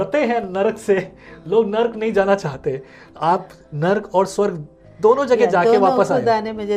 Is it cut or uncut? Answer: uncut